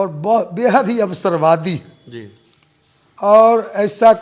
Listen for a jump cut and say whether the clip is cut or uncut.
uncut